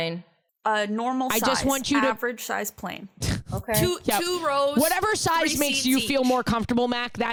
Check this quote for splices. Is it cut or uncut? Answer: uncut